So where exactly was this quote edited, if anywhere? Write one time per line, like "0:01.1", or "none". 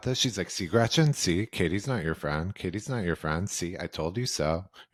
none